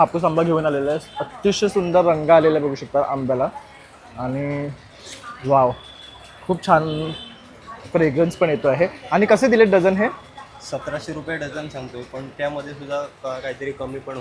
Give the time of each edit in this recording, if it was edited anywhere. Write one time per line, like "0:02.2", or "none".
none